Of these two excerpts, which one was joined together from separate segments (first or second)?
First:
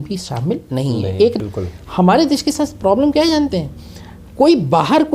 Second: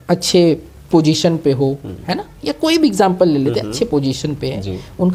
first